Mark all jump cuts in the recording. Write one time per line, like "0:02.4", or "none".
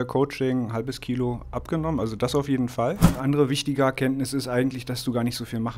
0:03.1